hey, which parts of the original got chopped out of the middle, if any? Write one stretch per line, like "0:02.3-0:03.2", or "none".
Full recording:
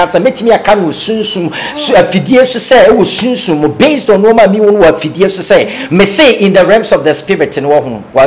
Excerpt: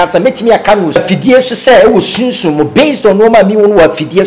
0:01.0-0:02.0